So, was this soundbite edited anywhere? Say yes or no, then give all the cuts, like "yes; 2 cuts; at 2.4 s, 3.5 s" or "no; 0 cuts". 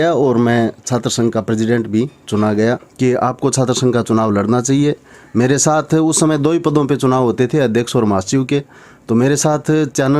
yes; 1 cut; at 2.9 s